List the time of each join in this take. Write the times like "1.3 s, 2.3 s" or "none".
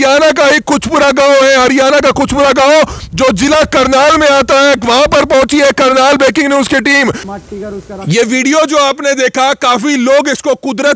7.2 s